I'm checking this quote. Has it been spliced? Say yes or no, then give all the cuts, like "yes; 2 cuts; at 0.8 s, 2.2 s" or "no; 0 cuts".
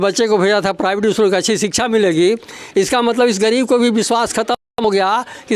no; 0 cuts